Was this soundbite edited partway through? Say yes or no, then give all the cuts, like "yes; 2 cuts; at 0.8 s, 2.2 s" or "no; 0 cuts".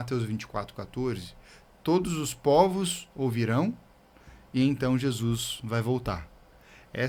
no; 0 cuts